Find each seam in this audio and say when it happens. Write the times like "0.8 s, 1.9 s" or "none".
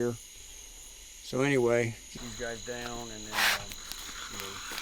2.1 s